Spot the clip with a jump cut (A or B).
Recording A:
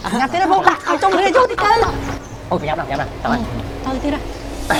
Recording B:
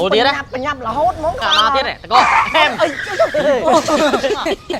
B